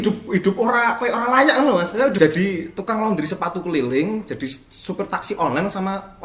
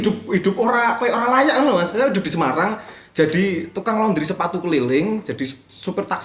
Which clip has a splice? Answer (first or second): first